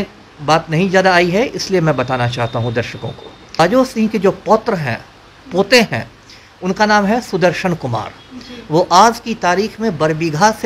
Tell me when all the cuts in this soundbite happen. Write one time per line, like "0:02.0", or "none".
0:03.6